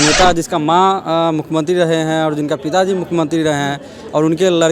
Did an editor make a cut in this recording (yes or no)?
no